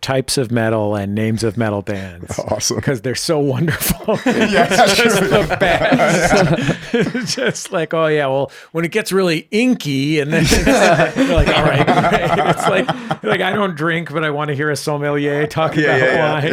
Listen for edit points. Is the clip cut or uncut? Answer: uncut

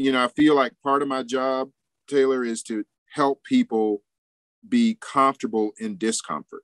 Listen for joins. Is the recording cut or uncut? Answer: cut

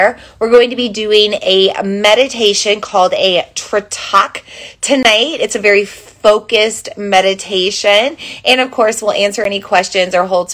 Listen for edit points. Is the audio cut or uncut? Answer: uncut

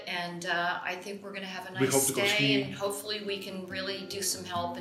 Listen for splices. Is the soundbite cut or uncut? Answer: uncut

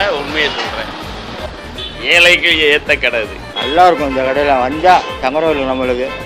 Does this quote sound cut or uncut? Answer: cut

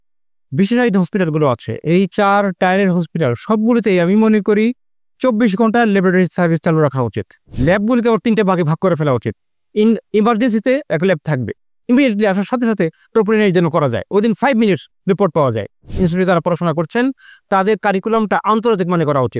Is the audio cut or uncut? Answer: cut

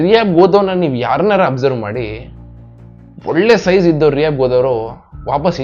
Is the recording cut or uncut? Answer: uncut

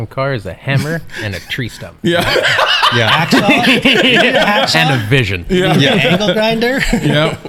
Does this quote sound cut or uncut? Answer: uncut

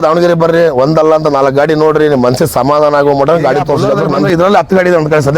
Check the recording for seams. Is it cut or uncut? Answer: cut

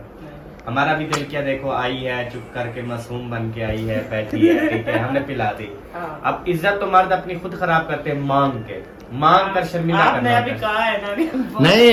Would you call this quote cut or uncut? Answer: uncut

